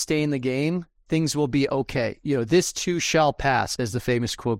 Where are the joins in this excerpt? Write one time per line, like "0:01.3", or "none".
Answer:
0:03.7